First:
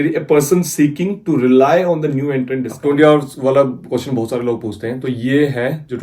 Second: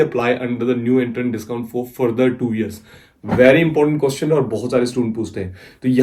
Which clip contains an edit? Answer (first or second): first